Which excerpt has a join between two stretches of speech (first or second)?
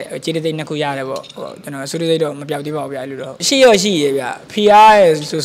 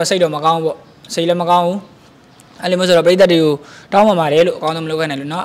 first